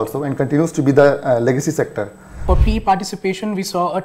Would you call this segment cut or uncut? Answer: cut